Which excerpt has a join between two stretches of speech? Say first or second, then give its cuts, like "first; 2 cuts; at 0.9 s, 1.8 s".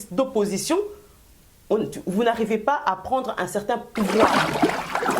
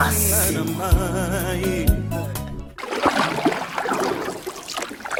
first; 1 cut; at 4.2 s